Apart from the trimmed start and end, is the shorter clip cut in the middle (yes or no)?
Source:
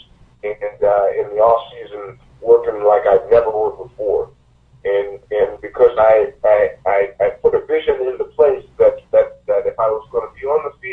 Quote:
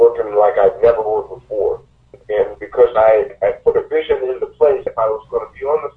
yes